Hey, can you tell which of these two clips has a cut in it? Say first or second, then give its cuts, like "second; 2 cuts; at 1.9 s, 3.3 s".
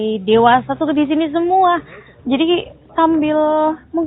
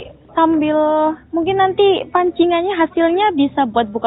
first; 1 cut; at 1.6 s